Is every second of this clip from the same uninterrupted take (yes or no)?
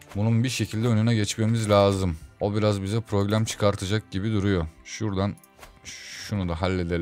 yes